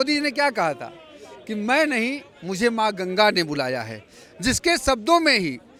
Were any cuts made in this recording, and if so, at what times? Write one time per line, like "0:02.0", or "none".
none